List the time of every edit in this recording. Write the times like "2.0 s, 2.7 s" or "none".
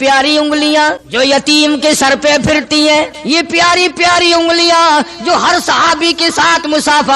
1.0 s, 3.2 s